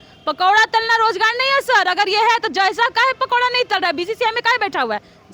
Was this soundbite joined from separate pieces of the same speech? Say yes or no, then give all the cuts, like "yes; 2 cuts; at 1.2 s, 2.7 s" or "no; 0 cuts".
no; 0 cuts